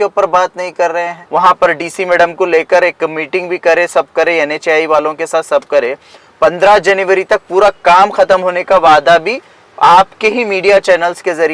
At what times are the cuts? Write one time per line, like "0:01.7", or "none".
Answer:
0:01.2